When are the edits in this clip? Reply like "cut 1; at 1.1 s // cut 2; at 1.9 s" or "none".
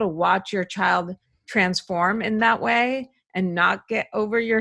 none